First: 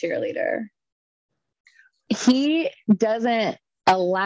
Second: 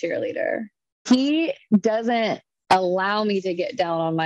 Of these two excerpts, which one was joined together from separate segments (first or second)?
second